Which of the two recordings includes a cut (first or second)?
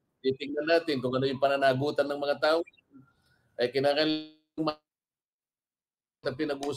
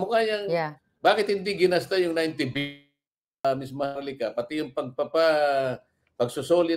second